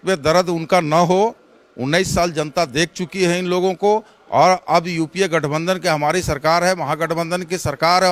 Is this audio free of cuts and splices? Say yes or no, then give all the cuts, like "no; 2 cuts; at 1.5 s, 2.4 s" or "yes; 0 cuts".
yes; 0 cuts